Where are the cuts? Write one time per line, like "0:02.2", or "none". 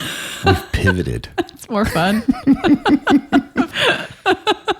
0:03.7